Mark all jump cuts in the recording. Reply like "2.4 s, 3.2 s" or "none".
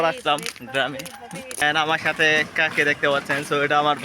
1.6 s